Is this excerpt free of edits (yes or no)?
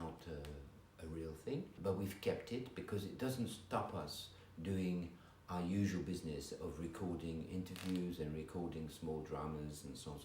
yes